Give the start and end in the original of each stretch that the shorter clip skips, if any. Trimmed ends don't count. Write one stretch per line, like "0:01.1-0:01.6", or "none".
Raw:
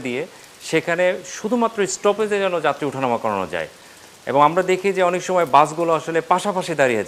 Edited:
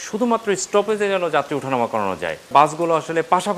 0:03.8-0:05.5